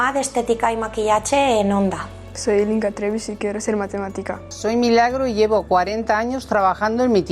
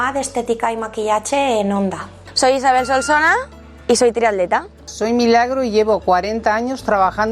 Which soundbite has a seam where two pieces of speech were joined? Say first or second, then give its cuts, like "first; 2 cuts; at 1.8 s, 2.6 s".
second; 2 cuts; at 2.2 s, 4.8 s